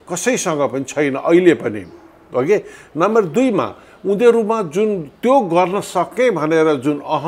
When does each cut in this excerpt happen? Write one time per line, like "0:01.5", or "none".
none